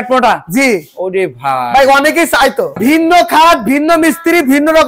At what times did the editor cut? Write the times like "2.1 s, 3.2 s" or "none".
2.8 s